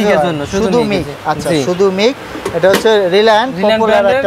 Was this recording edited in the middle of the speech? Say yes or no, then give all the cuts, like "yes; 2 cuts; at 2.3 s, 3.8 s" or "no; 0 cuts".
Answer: no; 0 cuts